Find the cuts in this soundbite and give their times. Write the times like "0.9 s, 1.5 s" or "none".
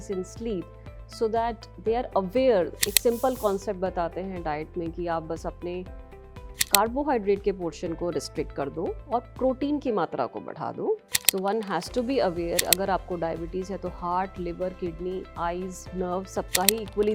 2.8 s, 11.1 s

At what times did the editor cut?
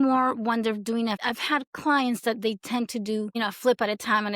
1.2 s, 3.4 s

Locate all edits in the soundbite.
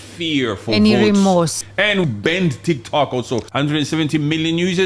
2.0 s, 3.5 s

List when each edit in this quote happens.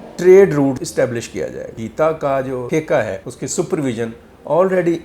0.8 s, 1.8 s, 2.7 s, 3.3 s

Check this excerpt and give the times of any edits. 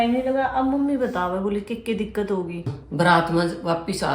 2.8 s

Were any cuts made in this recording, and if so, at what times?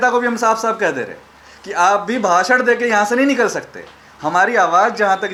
none

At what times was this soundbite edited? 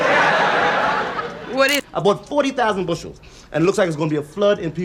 1.8 s

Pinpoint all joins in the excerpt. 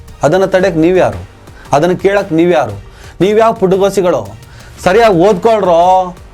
none

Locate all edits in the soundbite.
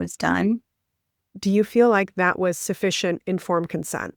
1.3 s

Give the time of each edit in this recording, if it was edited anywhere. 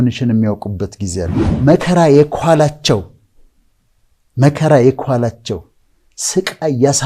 1.4 s

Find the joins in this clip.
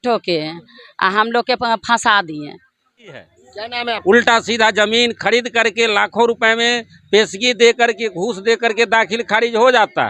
4.0 s

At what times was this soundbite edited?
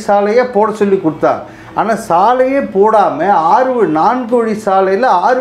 none

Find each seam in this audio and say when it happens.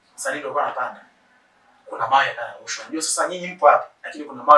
none

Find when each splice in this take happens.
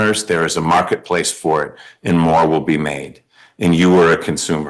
none

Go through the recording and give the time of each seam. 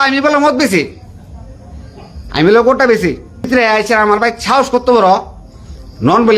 3.5 s

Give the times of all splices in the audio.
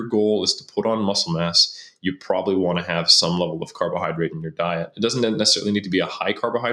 none

